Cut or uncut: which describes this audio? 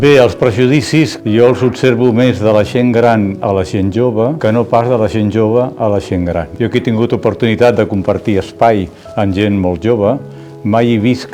cut